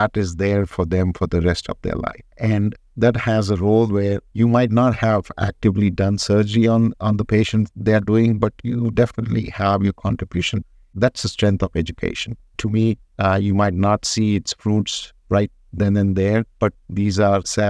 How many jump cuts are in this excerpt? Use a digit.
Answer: 5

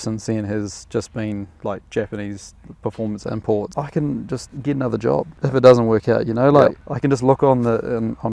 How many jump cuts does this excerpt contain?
4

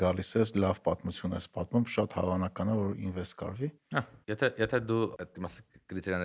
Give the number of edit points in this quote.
2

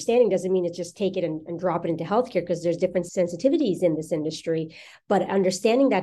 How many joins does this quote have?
1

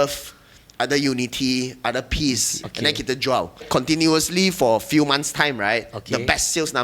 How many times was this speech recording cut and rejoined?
2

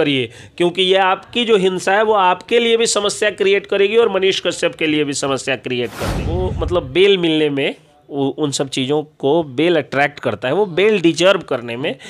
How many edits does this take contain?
1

